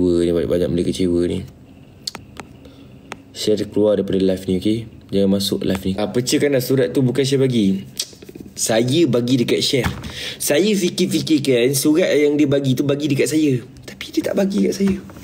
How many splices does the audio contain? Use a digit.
2